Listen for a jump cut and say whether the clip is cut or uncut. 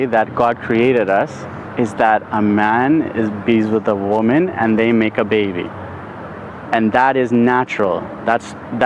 uncut